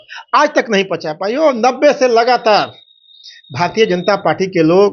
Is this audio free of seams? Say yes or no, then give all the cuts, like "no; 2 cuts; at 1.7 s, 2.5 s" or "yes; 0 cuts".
yes; 0 cuts